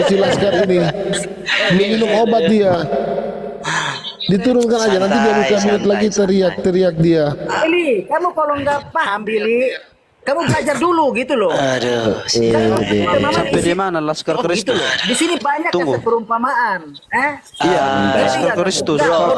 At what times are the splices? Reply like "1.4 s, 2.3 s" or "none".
none

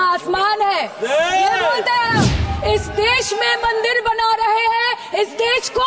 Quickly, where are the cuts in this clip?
2.5 s

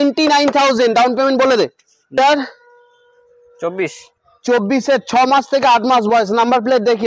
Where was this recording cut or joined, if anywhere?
2.2 s

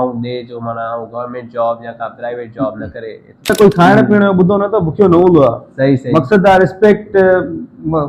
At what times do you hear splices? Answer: 3.5 s

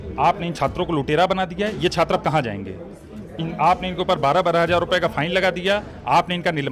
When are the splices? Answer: none

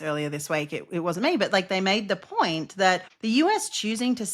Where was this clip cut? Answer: 3.1 s

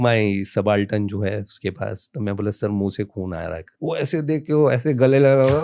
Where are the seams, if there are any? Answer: 3.7 s

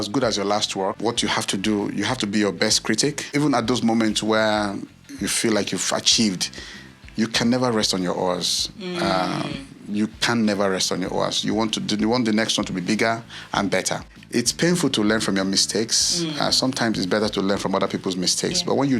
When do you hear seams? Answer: 1.0 s, 3.2 s, 14.1 s

